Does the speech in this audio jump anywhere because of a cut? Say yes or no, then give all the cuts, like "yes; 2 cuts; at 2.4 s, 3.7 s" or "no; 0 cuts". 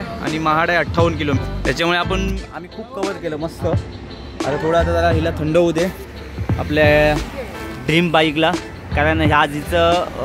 no; 0 cuts